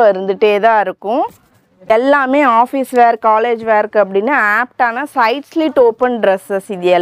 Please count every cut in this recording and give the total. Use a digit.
1